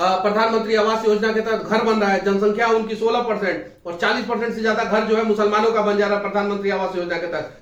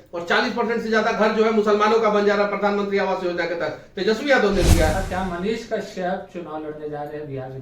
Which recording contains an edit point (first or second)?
second